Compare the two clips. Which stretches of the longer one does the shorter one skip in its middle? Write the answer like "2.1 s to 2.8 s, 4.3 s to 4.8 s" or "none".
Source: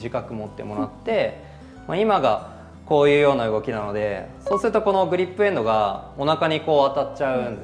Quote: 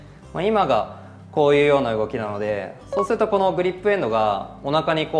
none